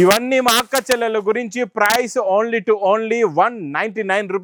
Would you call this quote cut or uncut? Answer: uncut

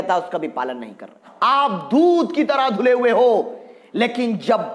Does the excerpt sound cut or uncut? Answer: cut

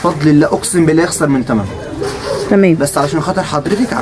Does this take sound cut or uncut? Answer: uncut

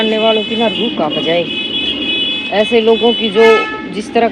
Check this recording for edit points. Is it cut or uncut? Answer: uncut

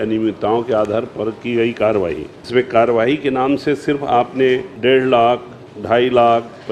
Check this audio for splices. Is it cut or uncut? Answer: cut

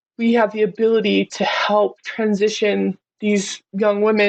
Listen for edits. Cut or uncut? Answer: uncut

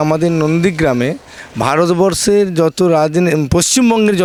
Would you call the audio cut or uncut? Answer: uncut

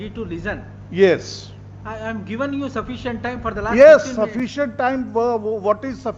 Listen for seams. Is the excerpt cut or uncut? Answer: uncut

